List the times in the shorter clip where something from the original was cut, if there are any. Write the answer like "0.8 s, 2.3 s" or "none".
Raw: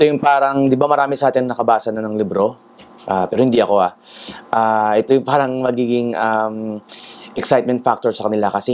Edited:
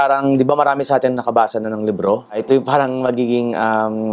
2.4 s